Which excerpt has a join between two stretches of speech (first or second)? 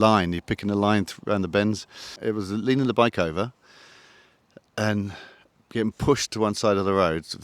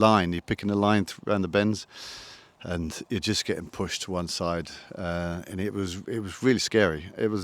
first